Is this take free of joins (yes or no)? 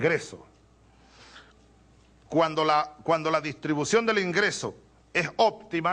no